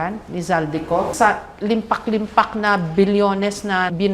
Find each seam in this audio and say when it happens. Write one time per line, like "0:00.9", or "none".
0:01.1